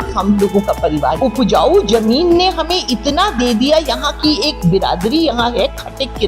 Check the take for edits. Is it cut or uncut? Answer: cut